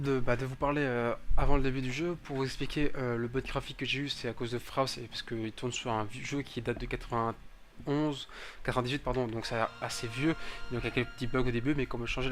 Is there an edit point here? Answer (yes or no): no